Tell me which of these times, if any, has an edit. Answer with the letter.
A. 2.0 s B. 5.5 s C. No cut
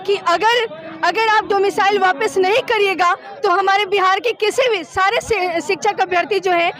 C